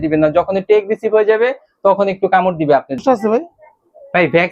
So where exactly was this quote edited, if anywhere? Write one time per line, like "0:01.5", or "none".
0:03.0